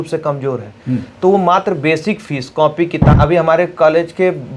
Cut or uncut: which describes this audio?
cut